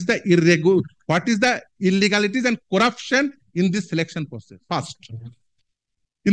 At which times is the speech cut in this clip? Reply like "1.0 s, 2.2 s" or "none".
4.5 s